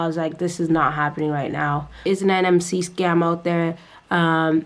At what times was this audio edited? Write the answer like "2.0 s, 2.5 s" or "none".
2.0 s